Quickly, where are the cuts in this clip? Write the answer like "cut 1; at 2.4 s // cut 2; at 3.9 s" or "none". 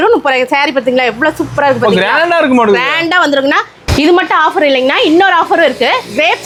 none